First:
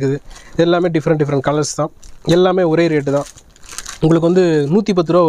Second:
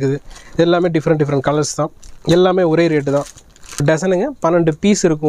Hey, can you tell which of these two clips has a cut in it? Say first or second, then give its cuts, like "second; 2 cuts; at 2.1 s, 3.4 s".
second; 1 cut; at 3.8 s